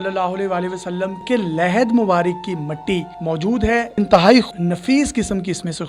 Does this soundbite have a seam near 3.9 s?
yes; 3 cuts; at 1.2 s, 3.9 s, 4.5 s

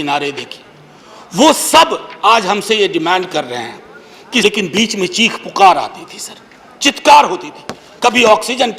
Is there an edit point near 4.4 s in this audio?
yes; 1 cut; at 4.4 s

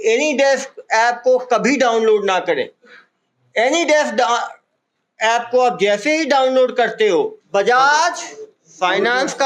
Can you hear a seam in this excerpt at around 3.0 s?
no; 1 cut; at 7.4 s

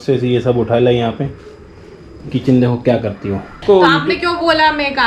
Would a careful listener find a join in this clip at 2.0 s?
no; 1 cut; at 3.6 s

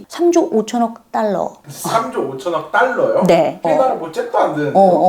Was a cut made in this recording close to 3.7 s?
yes; 1 cut; at 3.7 s

